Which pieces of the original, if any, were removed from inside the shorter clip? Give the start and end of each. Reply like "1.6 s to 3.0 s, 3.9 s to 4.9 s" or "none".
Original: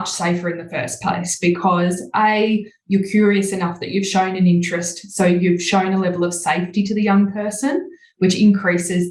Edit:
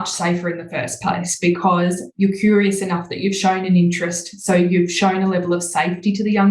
2.0 s to 2.7 s